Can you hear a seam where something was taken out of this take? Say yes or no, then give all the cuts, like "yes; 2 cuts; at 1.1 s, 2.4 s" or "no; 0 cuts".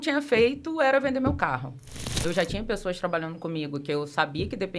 yes; 1 cut; at 2.1 s